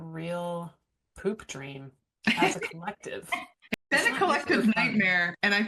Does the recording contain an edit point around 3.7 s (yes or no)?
yes